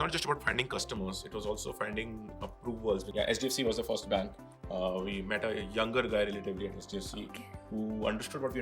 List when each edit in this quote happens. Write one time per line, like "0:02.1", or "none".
0:03.1